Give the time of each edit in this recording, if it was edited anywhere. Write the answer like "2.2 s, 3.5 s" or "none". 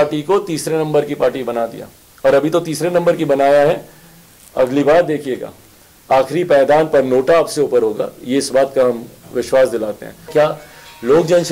10.3 s